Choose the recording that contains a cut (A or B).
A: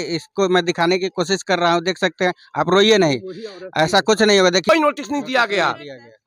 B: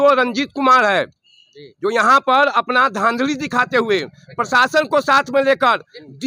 A